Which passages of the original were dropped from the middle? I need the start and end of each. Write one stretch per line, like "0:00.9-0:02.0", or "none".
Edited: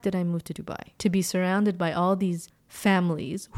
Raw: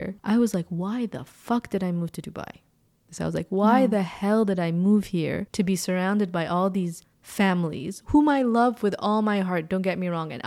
0:02.6-0:05.5